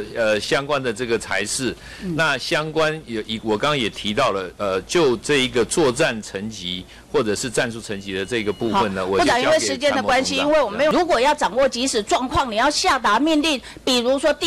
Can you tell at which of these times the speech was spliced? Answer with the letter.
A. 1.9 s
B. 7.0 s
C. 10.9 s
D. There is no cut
C